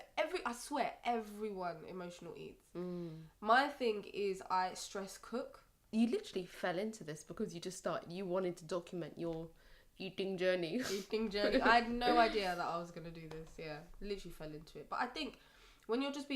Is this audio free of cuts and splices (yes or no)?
no